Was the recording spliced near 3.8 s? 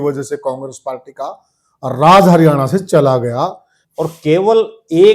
yes; 1 cut; at 3.8 s

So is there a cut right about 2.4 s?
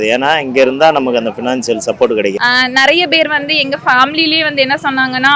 yes; 1 cut; at 2.4 s

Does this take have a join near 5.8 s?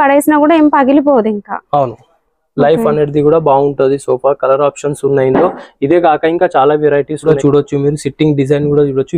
no; 1 cut; at 7.2 s

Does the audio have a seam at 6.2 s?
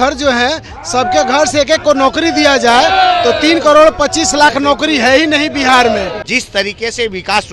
yes; 1 cut; at 6.2 s

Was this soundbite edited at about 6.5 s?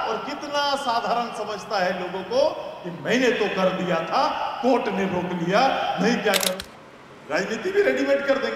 yes; 1 cut; at 6.5 s

